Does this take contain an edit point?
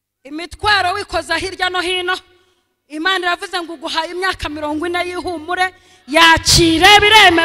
no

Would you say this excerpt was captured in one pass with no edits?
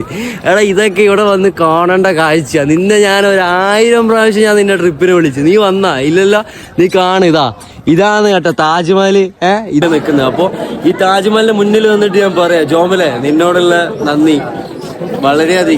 no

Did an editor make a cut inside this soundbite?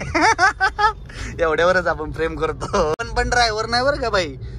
yes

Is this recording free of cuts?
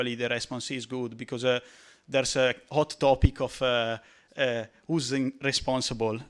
yes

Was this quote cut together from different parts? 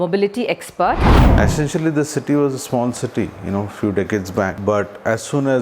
yes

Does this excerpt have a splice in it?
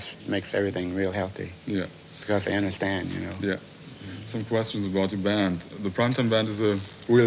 no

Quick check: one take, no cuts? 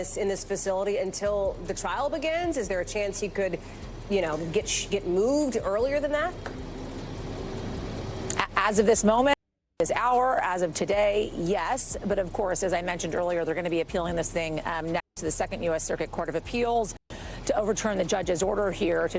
yes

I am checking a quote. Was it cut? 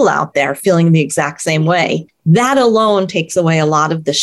yes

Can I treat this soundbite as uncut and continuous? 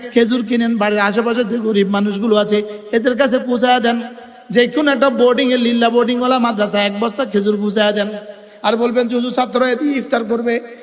yes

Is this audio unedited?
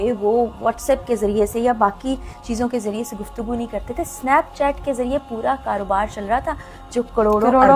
yes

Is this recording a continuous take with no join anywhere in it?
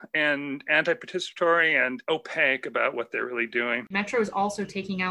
no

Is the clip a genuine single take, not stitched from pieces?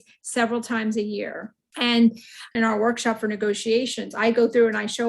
no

